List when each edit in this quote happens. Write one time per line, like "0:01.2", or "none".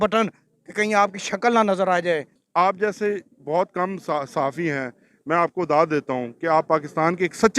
0:02.3